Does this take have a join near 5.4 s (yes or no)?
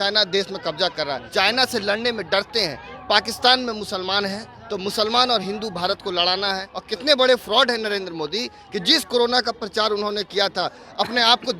no